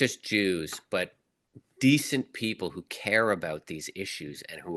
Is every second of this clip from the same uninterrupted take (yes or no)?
yes